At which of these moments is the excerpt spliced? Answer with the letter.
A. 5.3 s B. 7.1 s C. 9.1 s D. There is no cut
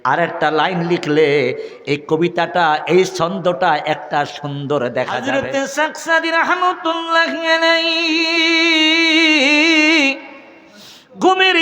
A